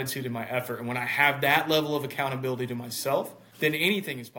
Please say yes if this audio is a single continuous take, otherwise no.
no